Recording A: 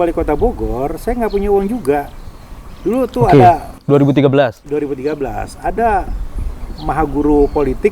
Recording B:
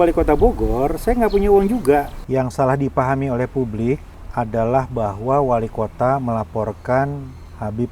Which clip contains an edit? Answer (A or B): B